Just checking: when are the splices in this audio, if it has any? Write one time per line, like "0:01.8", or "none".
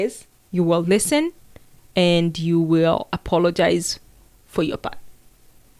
none